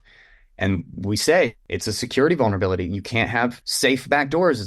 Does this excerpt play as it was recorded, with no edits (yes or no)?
no